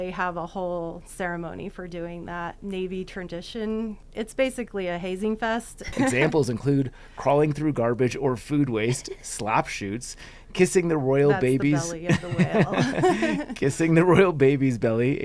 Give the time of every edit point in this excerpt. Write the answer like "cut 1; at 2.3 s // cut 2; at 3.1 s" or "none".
cut 1; at 2.6 s // cut 2; at 4.0 s // cut 3; at 5.9 s